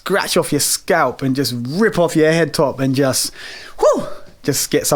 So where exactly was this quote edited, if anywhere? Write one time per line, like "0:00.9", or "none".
none

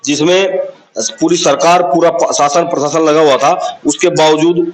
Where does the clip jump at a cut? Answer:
none

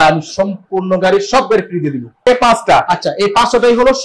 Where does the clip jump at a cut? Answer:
0:02.3

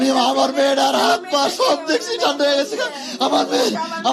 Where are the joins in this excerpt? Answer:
none

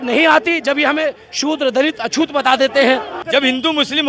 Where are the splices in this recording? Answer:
0:03.2

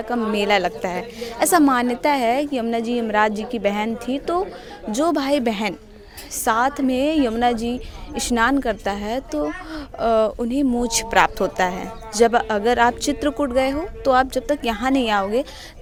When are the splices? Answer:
none

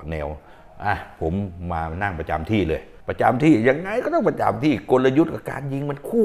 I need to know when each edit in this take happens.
none

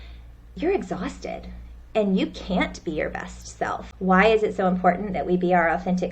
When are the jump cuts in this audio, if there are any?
0:03.8

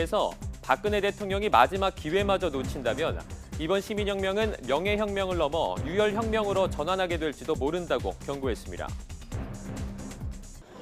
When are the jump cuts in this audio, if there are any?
0:07.8

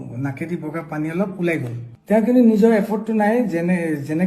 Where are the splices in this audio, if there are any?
0:01.8

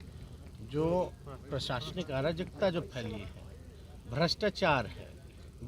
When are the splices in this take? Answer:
0:02.7

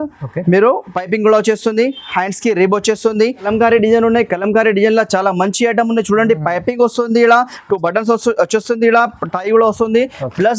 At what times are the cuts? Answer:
0:03.4

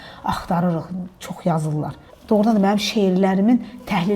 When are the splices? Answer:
0:02.1

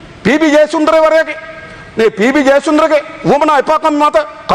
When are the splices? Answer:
none

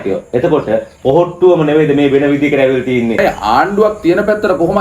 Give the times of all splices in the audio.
0:03.2

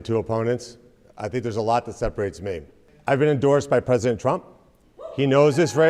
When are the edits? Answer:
0:02.9

